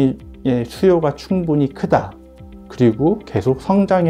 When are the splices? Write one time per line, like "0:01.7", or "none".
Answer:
none